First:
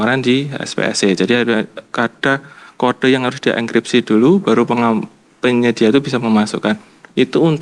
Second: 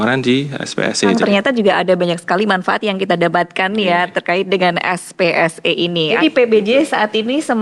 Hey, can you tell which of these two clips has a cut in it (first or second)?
second